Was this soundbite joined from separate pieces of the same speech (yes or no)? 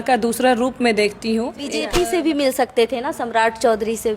yes